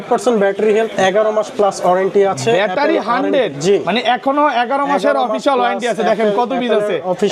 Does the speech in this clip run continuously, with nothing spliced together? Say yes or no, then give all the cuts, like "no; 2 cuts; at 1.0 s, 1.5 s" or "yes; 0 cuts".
yes; 0 cuts